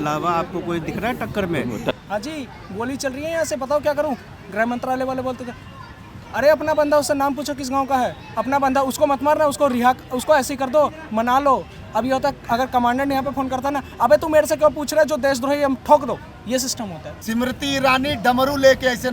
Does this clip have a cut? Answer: yes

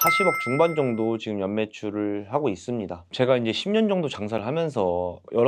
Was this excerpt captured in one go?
no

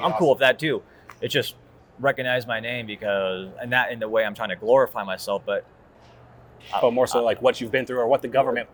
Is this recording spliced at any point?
no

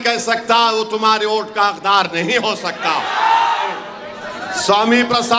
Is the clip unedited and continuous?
no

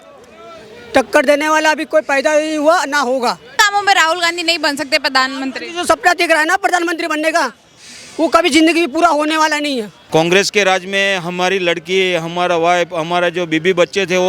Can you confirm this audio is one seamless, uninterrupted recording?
no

